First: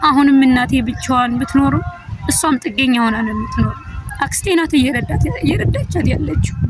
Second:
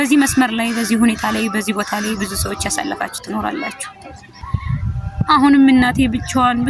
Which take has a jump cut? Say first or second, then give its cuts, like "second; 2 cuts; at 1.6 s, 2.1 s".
second; 1 cut; at 4.3 s